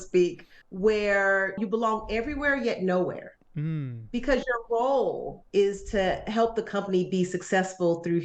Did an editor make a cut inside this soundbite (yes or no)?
yes